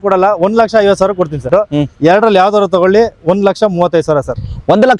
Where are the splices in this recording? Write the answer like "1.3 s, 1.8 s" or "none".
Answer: 1.4 s